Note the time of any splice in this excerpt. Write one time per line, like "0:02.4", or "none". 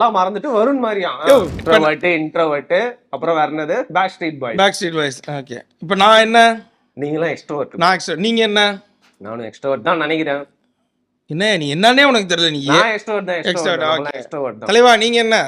0:01.6